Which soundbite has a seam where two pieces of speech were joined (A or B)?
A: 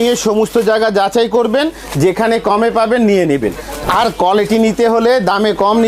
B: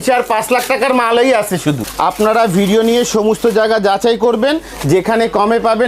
B